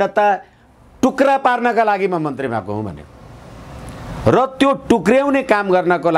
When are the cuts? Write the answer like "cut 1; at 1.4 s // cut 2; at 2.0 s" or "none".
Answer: none